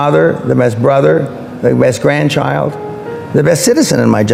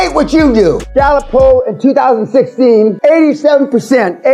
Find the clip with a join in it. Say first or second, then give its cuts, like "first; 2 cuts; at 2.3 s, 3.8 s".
second; 2 cuts; at 0.8 s, 3.0 s